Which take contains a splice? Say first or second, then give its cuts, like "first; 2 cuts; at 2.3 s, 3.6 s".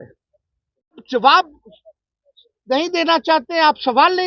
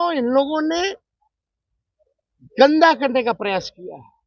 first; 1 cut; at 1.0 s